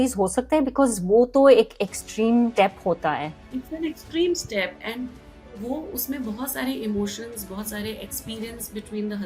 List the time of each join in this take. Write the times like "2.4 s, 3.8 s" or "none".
3.1 s